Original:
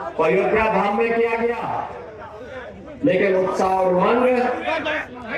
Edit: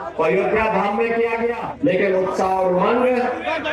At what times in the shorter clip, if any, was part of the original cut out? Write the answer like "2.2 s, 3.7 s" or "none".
1.7 s